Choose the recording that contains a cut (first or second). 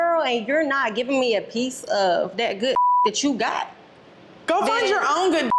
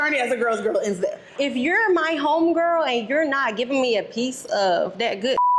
second